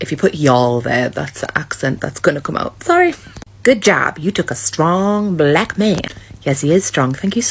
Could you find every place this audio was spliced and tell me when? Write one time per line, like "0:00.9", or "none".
none